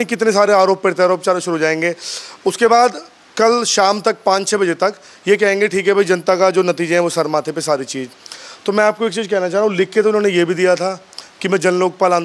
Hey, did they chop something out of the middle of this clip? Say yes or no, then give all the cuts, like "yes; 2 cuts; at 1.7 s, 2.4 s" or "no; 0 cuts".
no; 0 cuts